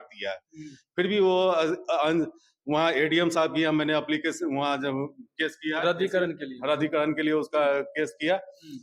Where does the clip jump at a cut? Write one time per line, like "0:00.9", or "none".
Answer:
none

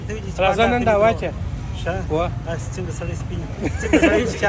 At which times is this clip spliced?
none

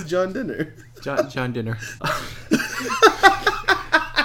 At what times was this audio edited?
0:01.9

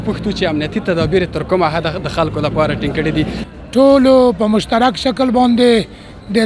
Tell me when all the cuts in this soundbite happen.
0:03.4

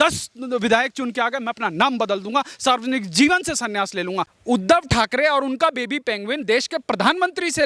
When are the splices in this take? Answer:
0:04.3

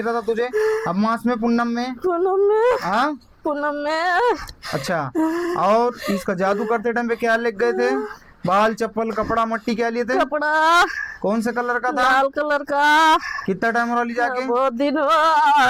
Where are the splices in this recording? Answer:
none

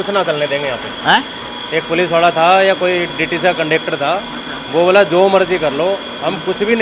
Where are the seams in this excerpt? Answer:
none

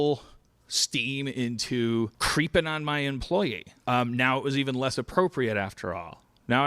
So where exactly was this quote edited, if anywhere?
none

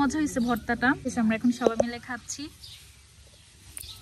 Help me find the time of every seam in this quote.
0:01.1

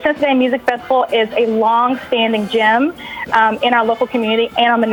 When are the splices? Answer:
none

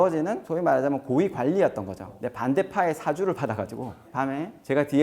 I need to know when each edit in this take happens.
0:02.1

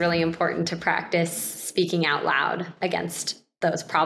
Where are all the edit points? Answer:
none

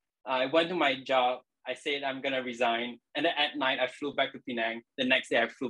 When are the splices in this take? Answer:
none

